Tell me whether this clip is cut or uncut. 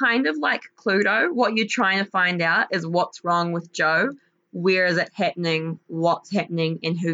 uncut